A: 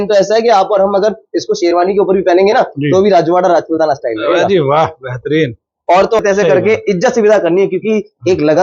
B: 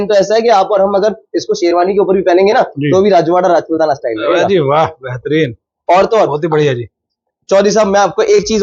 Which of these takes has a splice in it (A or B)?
A